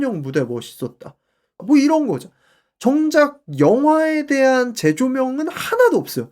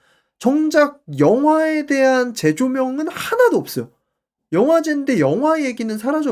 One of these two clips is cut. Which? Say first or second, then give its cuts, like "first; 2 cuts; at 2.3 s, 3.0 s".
first; 1 cut; at 1.5 s